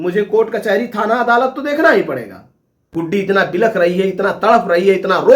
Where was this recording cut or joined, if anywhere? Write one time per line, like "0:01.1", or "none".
0:02.8